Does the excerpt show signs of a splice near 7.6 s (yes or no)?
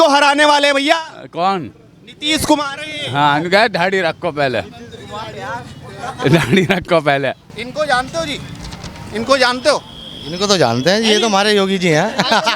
yes